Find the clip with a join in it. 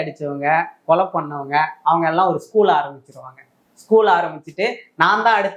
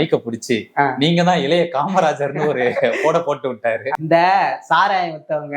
second; 1 cut; at 3.9 s

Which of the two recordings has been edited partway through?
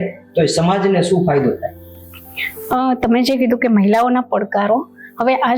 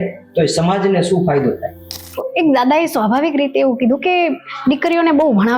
second; 1 cut; at 2.3 s

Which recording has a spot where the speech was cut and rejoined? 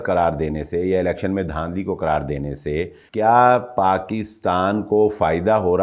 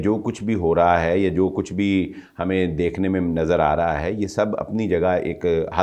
first; 1 cut; at 3.0 s

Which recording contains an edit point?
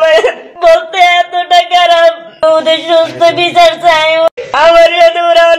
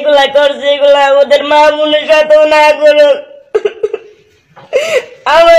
first; 1 cut; at 4.4 s

